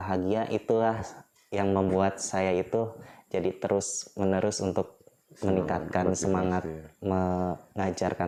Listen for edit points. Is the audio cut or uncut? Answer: uncut